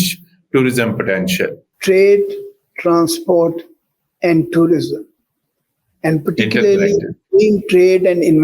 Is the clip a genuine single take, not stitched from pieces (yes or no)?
no